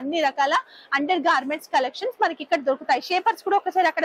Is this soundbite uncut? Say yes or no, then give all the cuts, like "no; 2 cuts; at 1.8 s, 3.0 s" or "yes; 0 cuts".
yes; 0 cuts